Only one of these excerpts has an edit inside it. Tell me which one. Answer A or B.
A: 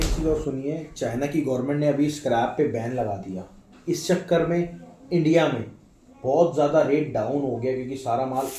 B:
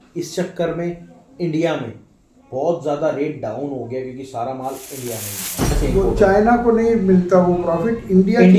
B